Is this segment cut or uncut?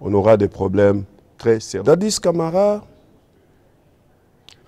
cut